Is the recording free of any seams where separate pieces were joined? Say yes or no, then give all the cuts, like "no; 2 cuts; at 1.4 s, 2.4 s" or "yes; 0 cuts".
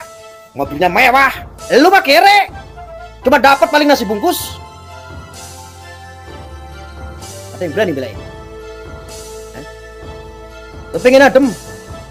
yes; 0 cuts